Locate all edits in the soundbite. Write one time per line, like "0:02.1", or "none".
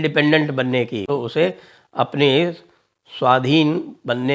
0:01.0